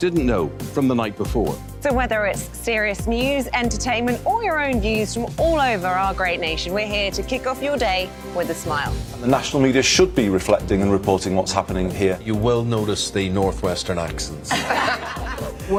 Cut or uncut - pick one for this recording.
uncut